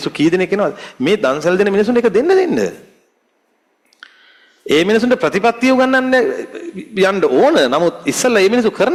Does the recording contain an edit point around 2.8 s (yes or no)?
no